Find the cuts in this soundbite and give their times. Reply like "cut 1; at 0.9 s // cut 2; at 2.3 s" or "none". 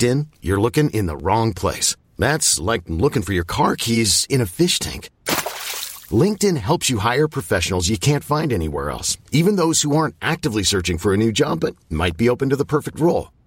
none